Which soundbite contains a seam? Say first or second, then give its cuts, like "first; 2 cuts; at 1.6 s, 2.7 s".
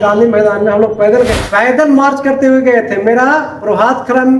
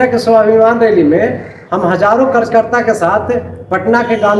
first; 1 cut; at 1.4 s